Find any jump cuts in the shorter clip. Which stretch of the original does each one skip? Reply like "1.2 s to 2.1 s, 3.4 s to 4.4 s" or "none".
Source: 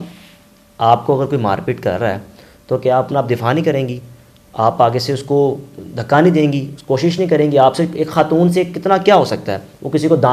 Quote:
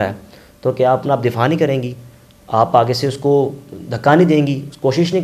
none